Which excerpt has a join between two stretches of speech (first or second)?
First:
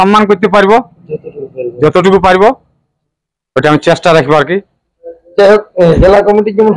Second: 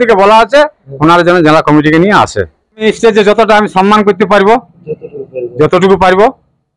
second